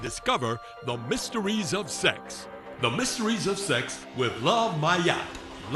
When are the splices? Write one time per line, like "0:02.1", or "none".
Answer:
none